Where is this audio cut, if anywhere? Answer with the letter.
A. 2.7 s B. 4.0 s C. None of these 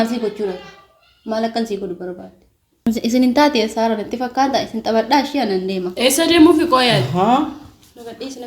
A